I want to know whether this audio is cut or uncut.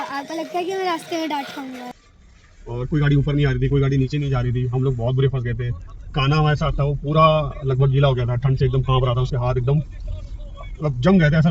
cut